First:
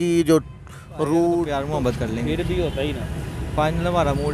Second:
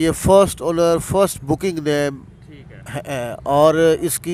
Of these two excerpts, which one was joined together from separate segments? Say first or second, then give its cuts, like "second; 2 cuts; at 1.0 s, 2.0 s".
first; 1 cut; at 1.6 s